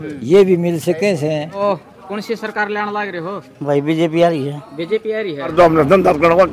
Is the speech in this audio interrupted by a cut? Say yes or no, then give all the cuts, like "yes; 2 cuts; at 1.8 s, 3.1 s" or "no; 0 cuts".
yes; 2 cuts; at 1.6 s, 5.5 s